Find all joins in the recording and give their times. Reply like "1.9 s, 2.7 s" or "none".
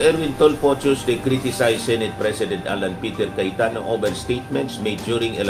none